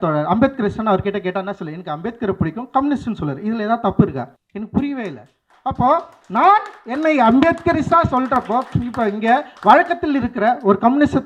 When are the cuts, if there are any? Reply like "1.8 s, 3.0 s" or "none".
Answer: 4.4 s